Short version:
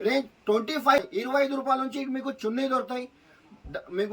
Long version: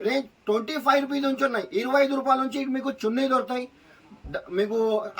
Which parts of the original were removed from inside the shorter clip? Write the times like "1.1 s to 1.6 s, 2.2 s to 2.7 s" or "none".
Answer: 1.0 s to 1.6 s

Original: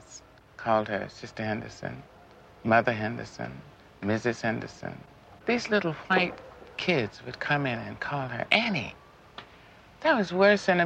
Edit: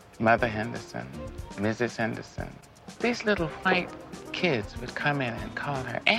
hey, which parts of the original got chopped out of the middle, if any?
none

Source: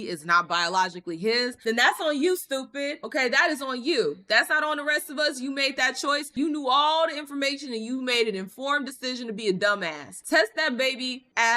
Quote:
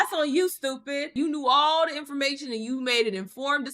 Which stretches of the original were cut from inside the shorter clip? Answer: 3.0 s to 6.3 s

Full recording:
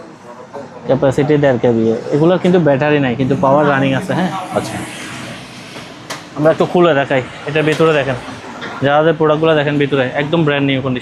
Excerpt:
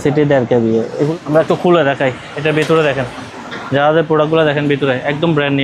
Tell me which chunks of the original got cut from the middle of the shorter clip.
2.2 s to 6.2 s

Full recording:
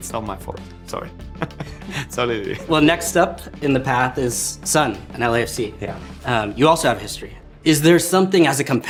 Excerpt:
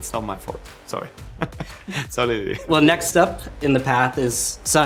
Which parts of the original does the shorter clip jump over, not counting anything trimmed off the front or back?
none

